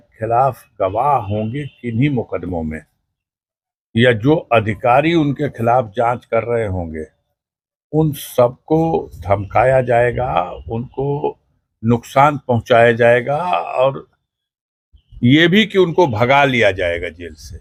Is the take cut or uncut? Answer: uncut